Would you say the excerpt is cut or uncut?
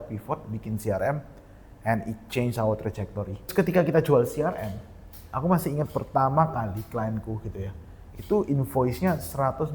cut